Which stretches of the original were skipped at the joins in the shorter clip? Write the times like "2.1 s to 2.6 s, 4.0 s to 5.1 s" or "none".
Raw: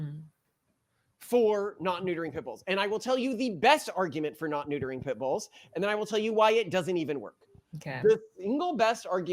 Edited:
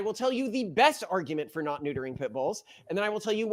none